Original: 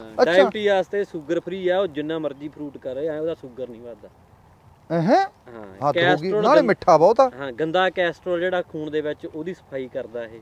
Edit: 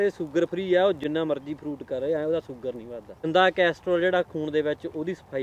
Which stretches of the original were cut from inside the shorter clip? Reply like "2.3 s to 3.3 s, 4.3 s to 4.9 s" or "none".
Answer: 4.2 s to 7.7 s